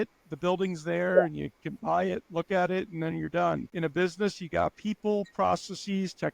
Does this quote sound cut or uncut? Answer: cut